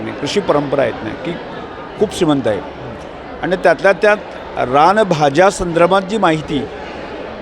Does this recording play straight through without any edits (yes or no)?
yes